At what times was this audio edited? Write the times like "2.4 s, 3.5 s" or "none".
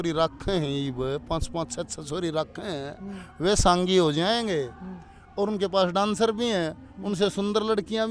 none